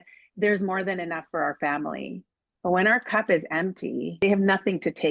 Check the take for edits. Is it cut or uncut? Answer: cut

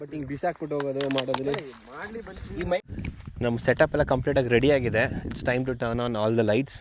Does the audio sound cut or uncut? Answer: cut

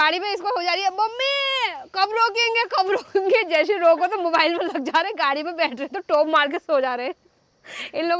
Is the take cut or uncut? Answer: uncut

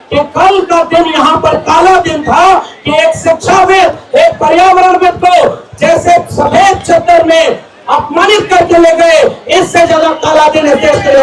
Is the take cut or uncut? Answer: uncut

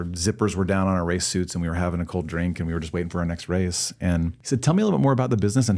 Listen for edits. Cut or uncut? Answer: cut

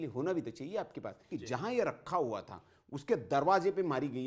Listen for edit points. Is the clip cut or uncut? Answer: cut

